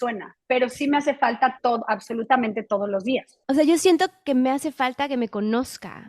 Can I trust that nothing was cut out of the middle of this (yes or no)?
no